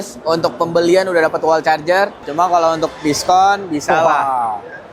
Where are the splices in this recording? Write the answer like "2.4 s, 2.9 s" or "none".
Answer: 2.2 s